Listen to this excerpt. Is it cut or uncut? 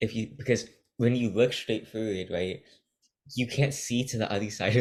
uncut